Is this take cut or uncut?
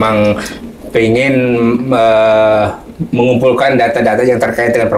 uncut